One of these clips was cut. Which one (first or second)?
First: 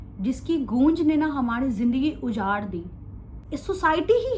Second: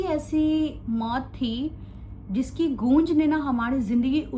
first